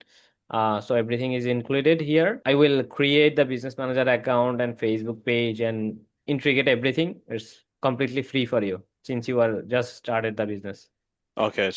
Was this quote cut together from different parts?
yes; 1 cut; at 2.4 s

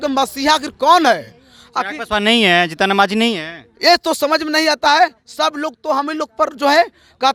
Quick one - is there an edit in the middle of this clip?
no; 0 cuts

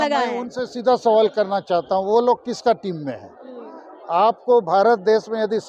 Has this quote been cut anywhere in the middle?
no; 0 cuts

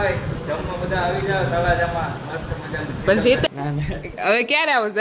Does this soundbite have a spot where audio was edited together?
yes; 1 cut; at 3.5 s

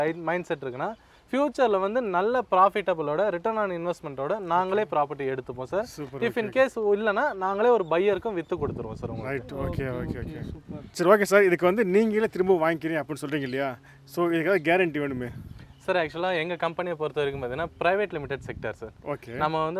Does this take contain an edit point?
no; 0 cuts

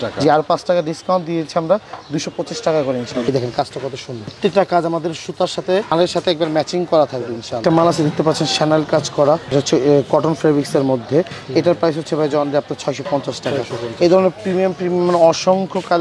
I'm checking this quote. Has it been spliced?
yes; 2 cuts; at 3.2 s, 7.6 s

